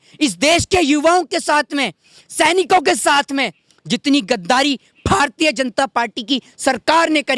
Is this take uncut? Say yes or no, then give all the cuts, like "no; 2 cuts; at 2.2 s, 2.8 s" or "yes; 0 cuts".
yes; 0 cuts